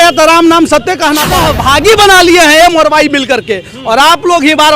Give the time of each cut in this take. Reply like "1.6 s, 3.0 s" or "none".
1.2 s